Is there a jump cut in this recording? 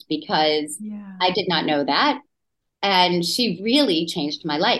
no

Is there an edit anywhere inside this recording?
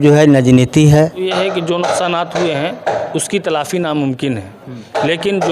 yes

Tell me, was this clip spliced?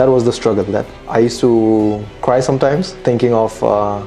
yes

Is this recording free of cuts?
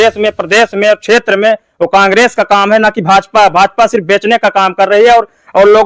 yes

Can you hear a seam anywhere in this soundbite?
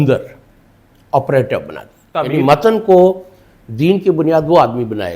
yes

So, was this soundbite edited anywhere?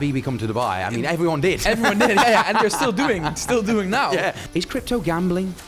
yes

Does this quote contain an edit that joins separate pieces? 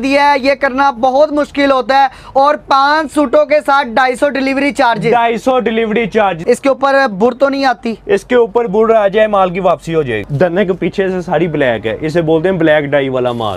yes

